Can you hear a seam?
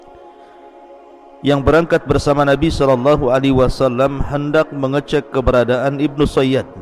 yes; 1 cut; at 1.4 s

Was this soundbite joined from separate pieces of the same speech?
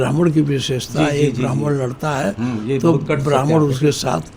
no; 0 cuts

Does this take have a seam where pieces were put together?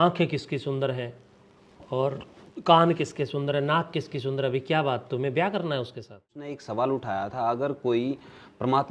yes; 1 cut; at 6.6 s

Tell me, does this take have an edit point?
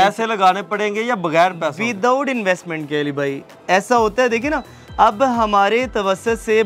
no; 0 cuts

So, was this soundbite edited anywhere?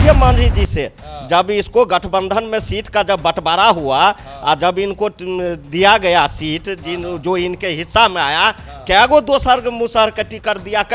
no; 0 cuts

